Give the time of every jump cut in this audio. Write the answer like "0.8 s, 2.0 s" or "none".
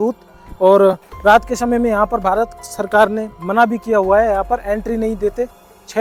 none